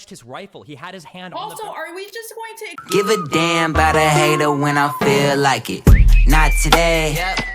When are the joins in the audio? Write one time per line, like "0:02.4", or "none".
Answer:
0:02.8